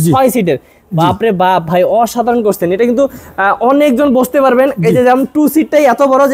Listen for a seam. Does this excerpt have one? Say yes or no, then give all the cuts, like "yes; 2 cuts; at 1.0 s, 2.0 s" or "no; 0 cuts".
no; 0 cuts